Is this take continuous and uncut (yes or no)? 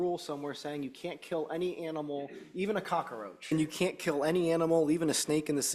no